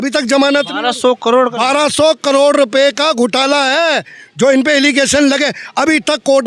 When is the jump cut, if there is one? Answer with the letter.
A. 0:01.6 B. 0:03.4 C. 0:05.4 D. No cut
D